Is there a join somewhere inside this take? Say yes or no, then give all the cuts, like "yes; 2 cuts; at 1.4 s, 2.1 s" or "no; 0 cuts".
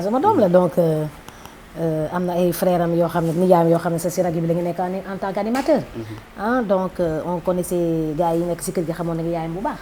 no; 0 cuts